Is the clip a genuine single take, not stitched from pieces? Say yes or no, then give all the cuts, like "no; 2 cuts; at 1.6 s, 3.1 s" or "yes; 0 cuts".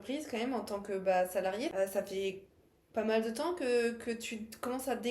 no; 1 cut; at 1.7 s